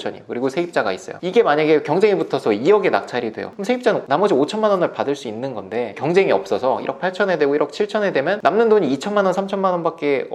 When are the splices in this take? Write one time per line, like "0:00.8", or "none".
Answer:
none